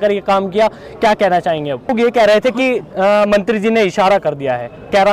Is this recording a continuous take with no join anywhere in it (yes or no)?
no